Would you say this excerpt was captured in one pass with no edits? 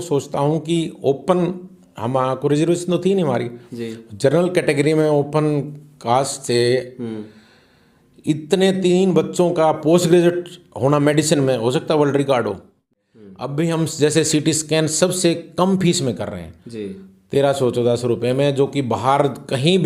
no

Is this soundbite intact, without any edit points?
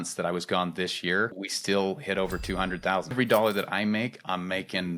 no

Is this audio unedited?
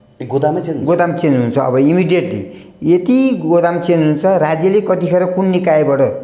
yes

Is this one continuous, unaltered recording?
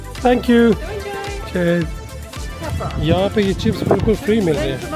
no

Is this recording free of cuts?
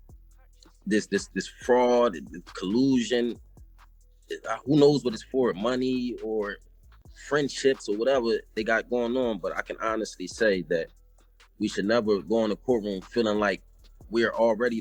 yes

